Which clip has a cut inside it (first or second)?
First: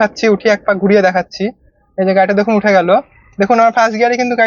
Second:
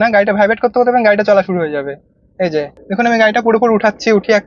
second